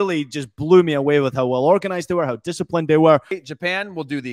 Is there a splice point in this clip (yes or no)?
yes